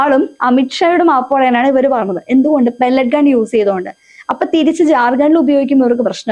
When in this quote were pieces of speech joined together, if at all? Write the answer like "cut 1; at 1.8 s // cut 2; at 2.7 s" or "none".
none

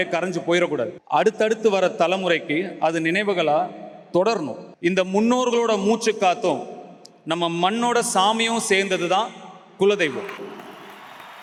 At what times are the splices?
none

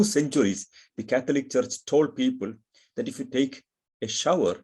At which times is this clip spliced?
none

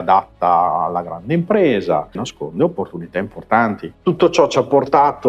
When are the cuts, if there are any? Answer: cut 1; at 2.3 s // cut 2; at 3.9 s

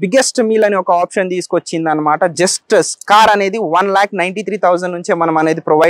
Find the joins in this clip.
none

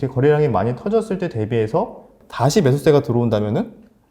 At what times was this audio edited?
cut 1; at 2.1 s

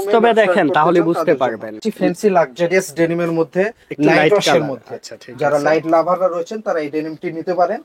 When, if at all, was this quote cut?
cut 1; at 1.8 s

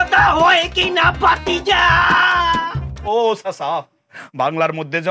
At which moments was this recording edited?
cut 1; at 2.9 s

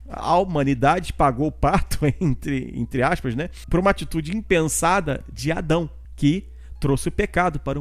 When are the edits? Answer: cut 1; at 3.5 s // cut 2; at 6.0 s

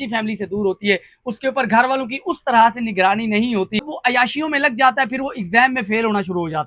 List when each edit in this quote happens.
cut 1; at 3.9 s

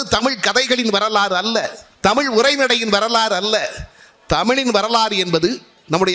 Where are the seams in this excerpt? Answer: cut 1; at 1.8 s

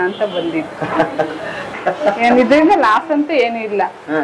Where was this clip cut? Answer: cut 1; at 1.6 s

